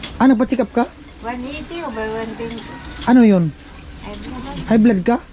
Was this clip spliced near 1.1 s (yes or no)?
no